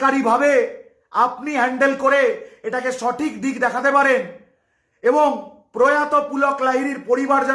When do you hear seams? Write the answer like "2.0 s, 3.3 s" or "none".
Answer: none

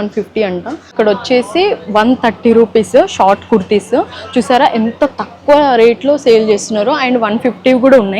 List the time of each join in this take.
0.9 s

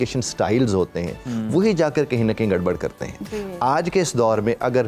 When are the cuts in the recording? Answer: none

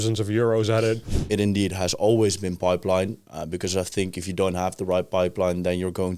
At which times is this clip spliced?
1.2 s

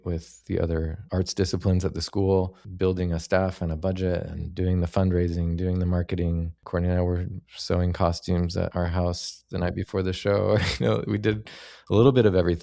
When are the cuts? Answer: 1.0 s, 6.5 s

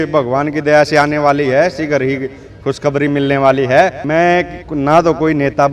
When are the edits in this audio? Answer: 4.0 s

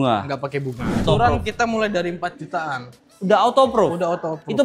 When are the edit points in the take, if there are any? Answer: 1.0 s

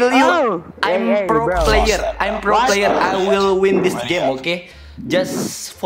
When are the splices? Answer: none

